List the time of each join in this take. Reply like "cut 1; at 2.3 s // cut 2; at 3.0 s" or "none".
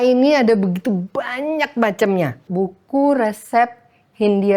cut 1; at 2.5 s